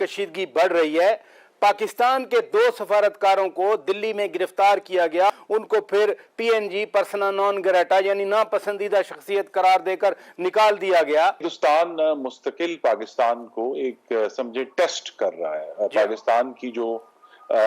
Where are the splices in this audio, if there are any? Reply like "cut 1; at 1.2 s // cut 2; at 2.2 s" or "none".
cut 1; at 5.4 s // cut 2; at 11.5 s